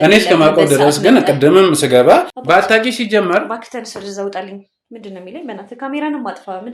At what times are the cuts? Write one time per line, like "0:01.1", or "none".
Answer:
0:02.3